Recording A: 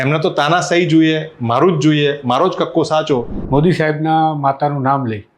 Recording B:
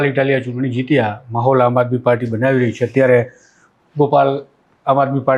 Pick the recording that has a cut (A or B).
A